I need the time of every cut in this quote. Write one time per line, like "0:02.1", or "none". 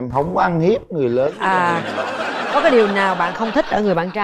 none